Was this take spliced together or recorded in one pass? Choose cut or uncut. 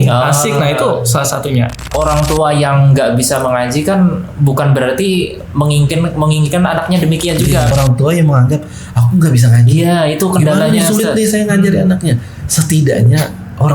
cut